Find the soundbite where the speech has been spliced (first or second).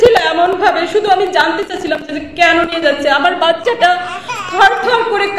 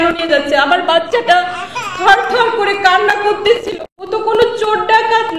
second